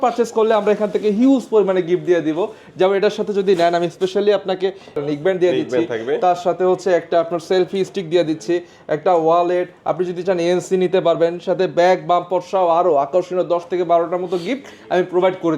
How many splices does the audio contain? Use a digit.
1